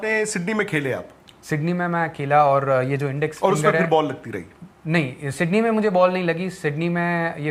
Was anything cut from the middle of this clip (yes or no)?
no